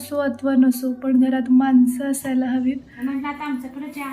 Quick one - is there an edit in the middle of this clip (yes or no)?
yes